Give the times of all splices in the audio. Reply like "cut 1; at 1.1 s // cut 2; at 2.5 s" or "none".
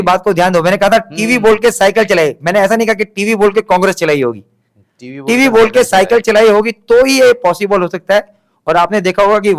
none